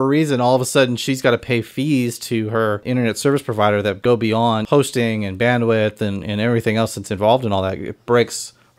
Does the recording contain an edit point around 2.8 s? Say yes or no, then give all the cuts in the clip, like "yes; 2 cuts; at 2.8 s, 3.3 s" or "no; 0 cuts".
yes; 2 cuts; at 2.8 s, 4.0 s